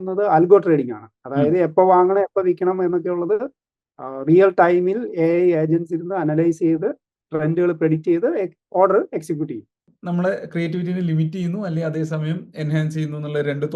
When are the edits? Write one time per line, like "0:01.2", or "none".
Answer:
0:09.8